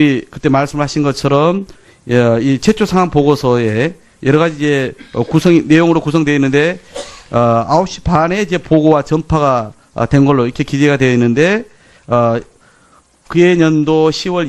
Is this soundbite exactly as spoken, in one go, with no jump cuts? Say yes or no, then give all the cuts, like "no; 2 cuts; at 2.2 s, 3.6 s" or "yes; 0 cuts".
no; 1 cut; at 10.0 s